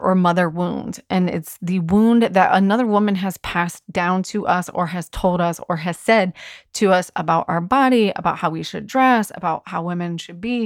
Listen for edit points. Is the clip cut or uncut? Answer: uncut